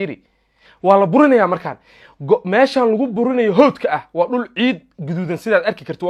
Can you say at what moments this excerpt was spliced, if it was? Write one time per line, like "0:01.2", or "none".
none